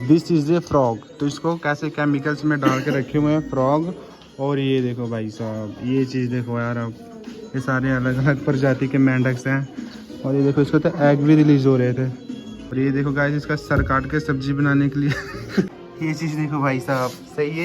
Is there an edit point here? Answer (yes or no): yes